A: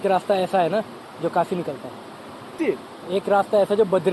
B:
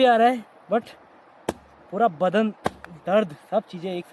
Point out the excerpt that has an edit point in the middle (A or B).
A